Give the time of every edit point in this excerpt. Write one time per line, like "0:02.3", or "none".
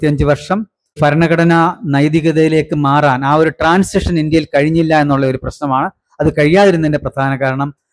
0:01.0